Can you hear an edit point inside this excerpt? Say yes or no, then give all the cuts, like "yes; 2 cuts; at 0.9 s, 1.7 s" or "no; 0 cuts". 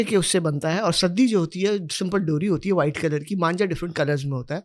no; 0 cuts